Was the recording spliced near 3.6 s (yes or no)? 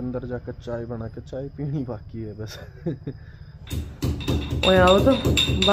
yes